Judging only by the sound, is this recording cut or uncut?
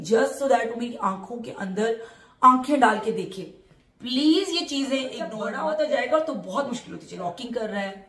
cut